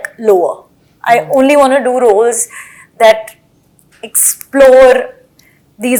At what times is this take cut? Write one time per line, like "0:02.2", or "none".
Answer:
none